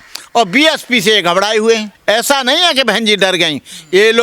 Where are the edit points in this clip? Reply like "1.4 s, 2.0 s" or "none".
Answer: 1.9 s